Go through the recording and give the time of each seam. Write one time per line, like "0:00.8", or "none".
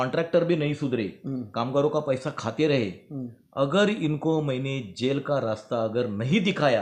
none